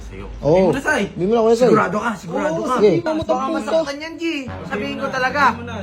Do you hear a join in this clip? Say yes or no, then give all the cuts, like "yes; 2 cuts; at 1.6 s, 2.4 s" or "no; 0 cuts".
yes; 1 cut; at 3.1 s